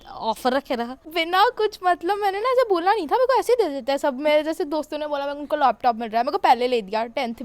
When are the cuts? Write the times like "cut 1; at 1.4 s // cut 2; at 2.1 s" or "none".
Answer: cut 1; at 1.1 s